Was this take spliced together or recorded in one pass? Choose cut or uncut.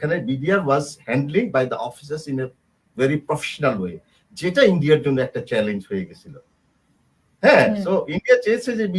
uncut